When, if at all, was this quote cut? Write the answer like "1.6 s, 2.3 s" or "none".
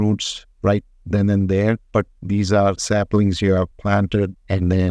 1.8 s, 4.0 s